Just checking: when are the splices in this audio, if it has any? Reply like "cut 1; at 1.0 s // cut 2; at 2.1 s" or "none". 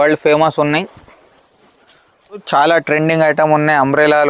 cut 1; at 2.4 s